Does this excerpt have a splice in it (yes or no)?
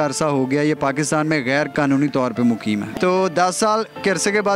yes